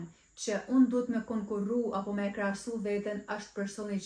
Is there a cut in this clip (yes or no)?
no